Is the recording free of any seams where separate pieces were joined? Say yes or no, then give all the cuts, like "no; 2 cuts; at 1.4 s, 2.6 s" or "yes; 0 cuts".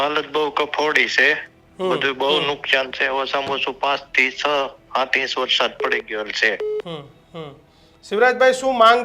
yes; 0 cuts